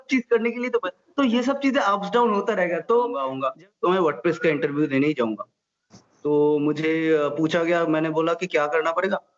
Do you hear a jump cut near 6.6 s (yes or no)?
no